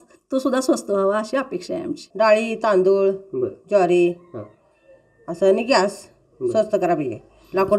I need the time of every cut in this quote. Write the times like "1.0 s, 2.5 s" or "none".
2.0 s